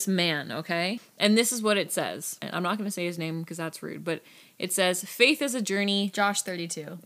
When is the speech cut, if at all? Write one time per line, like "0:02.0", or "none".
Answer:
0:01.1
0:02.4